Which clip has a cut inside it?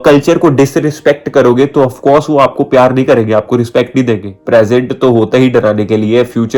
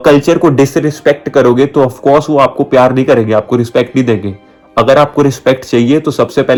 first; 1 cut; at 4.3 s

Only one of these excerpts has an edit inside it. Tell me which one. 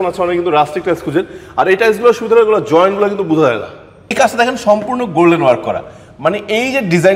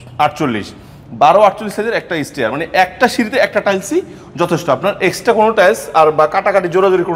first; 1 cut; at 4.1 s

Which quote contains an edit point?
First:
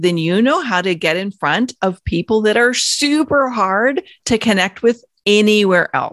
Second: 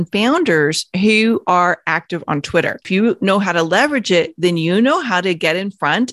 second; 1 cut; at 2.9 s

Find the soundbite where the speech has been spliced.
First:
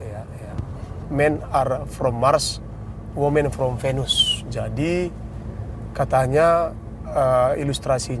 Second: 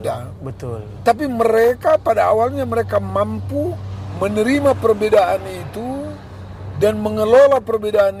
first; 1 cut; at 1.0 s

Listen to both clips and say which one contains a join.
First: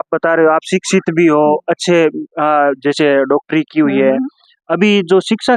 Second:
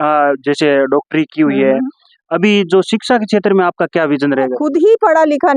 second; 1 cut; at 4.5 s

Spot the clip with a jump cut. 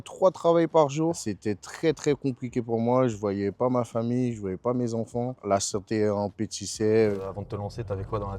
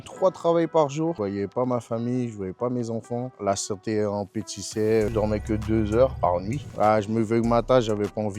second; 3 cuts; at 1.2 s, 5.1 s, 6.2 s

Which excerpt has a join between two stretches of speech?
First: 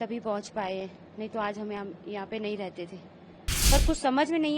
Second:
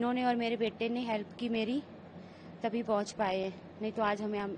first; 1 cut; at 3.4 s

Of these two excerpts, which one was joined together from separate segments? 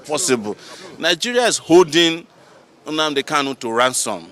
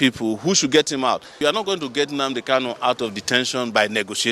second; 1 cut; at 1.4 s

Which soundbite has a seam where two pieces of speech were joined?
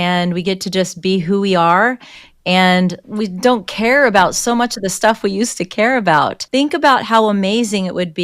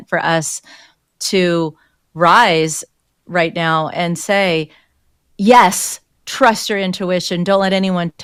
first; 2 cuts; at 3.0 s, 6.4 s

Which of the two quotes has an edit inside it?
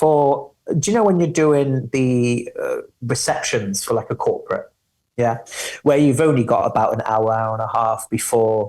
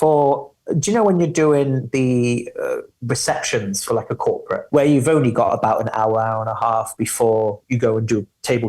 second; 1 cut; at 4.6 s

